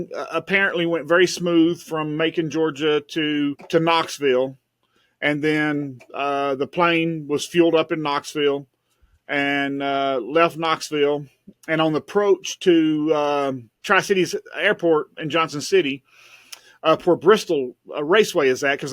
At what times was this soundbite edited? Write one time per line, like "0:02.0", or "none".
0:03.6
0:13.7